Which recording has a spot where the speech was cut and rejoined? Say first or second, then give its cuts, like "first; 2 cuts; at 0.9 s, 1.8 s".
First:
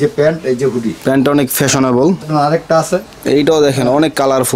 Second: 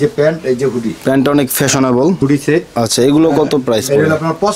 first; 1 cut; at 2.2 s